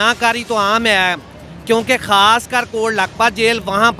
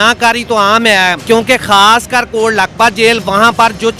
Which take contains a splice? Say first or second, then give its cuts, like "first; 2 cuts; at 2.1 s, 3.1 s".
second; 1 cut; at 1.2 s